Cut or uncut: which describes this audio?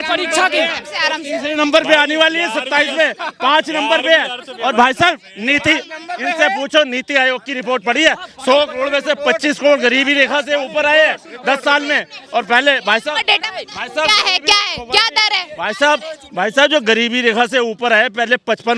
uncut